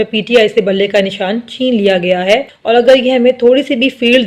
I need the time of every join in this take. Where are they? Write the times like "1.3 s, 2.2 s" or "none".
2.5 s